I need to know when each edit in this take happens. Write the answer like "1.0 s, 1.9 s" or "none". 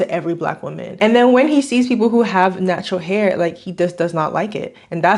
1.0 s